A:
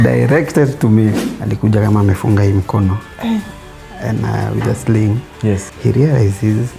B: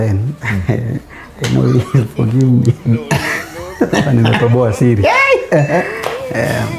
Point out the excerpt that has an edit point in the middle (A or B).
A